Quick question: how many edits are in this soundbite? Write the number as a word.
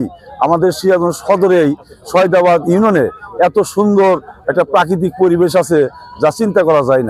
zero